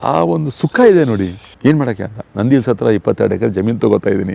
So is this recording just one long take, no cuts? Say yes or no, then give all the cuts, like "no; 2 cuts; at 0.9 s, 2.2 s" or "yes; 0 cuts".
no; 1 cut; at 1.4 s